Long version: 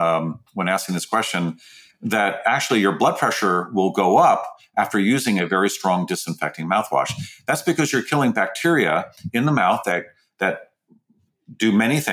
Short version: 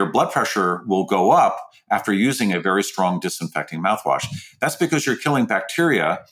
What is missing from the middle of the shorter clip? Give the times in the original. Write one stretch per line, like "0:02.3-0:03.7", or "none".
none